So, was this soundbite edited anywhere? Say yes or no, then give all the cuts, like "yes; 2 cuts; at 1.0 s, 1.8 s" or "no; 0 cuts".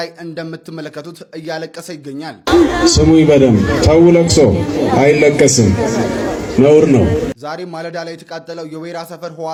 no; 0 cuts